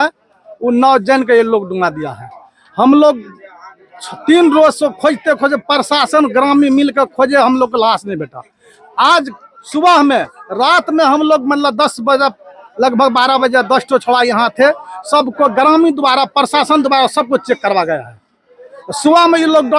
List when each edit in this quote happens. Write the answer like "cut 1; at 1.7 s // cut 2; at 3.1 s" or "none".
none